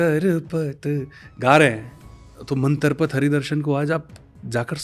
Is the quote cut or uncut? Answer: uncut